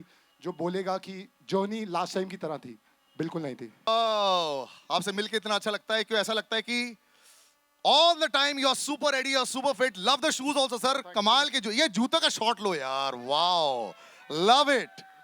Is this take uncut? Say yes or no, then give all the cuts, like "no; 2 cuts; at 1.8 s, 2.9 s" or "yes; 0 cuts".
no; 1 cut; at 3.9 s